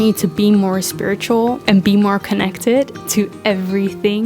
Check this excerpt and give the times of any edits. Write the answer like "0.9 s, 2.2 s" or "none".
1.6 s